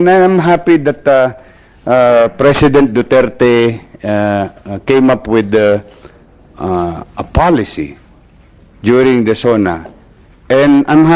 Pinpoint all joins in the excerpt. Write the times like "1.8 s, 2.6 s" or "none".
none